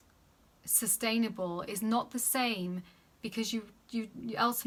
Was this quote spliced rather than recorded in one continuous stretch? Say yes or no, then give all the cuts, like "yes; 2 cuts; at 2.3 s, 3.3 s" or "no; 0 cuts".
no; 0 cuts